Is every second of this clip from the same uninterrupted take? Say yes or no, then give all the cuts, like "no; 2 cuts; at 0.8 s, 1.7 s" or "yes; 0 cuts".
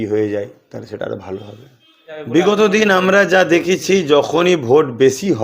no; 1 cut; at 2.2 s